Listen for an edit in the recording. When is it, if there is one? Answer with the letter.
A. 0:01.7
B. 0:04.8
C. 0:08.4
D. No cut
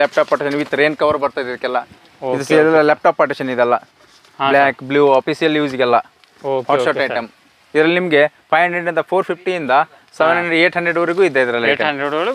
D